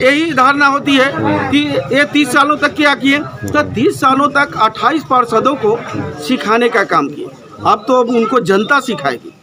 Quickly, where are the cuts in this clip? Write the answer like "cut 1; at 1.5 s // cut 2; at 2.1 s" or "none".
none